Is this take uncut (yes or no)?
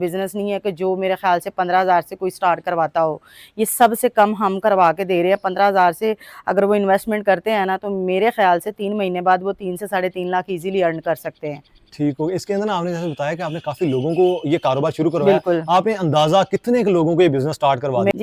yes